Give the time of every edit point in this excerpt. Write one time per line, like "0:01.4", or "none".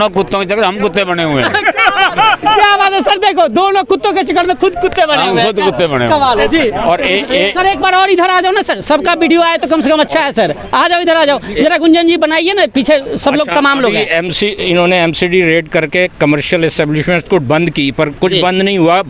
none